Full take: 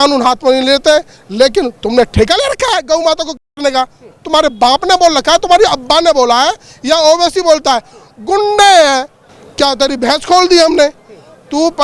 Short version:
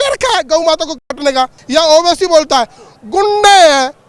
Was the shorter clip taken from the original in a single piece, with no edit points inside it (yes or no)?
no